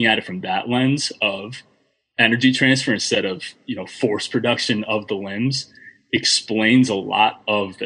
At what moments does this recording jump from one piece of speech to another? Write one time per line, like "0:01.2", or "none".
none